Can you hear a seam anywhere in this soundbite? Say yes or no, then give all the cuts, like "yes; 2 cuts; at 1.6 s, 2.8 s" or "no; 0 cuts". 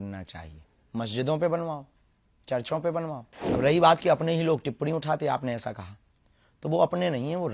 yes; 1 cut; at 3.3 s